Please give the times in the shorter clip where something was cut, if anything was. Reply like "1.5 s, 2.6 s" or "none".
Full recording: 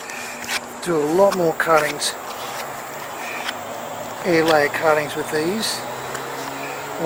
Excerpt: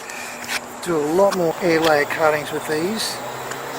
1.6 s